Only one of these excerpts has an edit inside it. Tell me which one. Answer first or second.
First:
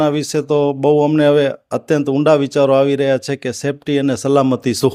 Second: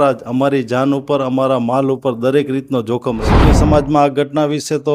second